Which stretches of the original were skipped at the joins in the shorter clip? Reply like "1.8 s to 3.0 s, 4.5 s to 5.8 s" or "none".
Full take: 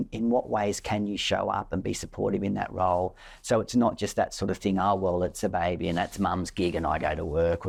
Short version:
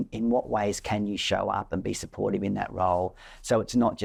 none